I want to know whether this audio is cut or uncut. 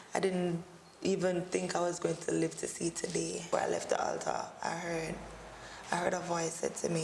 cut